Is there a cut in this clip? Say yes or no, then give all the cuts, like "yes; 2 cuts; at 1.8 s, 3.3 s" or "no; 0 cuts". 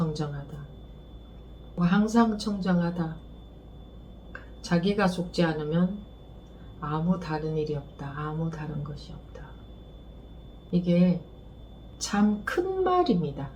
no; 0 cuts